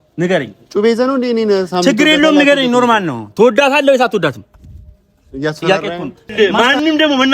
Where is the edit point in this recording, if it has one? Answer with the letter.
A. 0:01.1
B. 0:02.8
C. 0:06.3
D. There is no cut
C